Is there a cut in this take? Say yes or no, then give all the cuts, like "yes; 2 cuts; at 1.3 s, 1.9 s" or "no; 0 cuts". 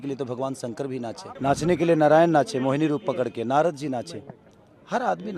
yes; 1 cut; at 1.2 s